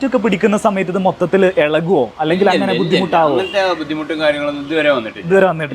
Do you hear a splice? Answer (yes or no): no